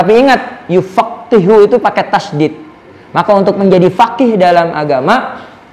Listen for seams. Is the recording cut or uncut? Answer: uncut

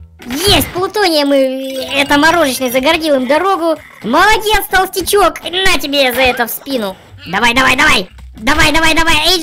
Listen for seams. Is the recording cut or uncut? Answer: cut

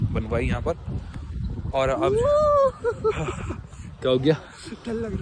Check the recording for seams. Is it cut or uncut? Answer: uncut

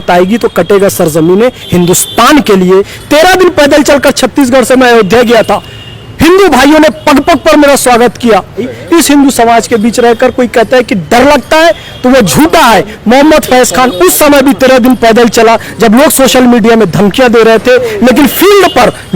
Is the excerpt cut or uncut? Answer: cut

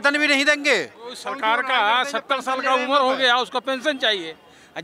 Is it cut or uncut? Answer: cut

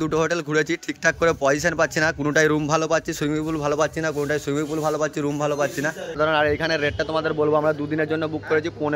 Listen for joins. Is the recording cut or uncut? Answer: uncut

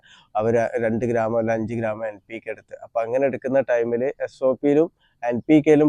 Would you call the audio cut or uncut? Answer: uncut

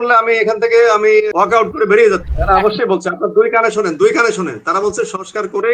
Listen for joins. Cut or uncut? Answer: cut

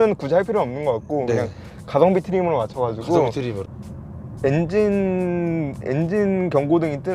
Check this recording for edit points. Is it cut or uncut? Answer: cut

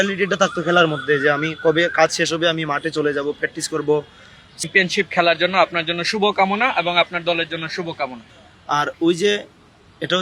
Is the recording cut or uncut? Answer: cut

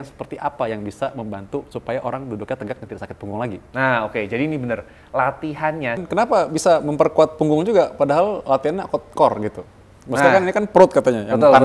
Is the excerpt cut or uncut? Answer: cut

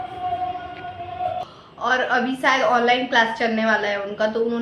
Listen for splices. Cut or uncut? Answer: cut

